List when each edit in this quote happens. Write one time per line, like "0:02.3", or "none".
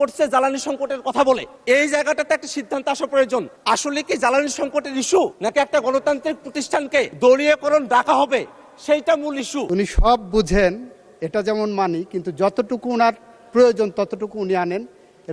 0:01.5
0:03.5
0:05.4
0:07.1
0:09.7